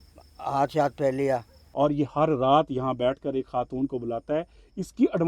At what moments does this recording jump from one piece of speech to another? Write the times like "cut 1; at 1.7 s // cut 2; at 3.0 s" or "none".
cut 1; at 1.6 s